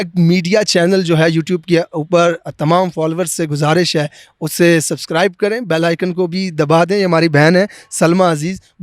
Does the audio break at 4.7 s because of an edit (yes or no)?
no